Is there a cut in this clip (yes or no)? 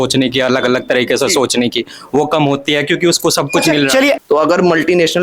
yes